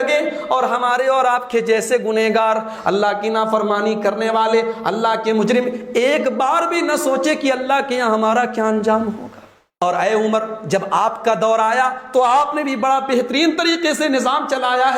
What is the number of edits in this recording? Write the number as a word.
one